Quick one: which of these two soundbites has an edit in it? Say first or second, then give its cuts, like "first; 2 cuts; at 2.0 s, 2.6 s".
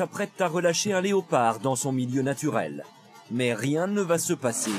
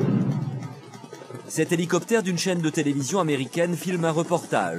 second; 1 cut; at 1.2 s